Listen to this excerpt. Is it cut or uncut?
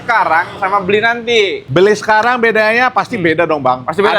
cut